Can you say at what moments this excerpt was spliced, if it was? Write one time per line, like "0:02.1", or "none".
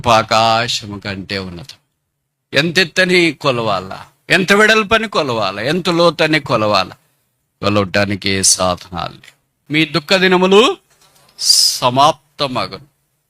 0:09.6

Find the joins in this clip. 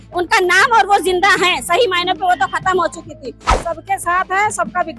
0:03.4

